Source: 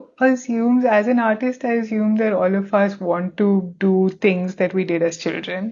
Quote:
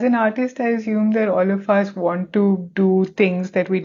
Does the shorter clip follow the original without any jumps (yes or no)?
yes